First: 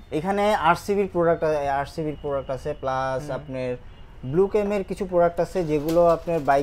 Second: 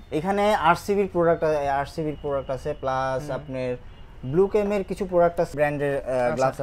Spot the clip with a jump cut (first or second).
second